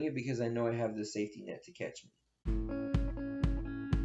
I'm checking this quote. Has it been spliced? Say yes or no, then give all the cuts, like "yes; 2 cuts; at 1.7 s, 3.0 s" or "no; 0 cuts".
yes; 1 cut; at 2.3 s